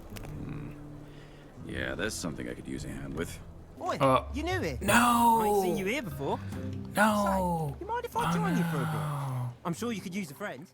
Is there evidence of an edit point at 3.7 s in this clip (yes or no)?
yes